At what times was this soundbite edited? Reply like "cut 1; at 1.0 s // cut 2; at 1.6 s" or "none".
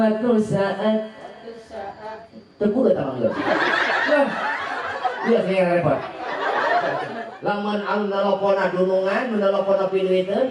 cut 1; at 7.3 s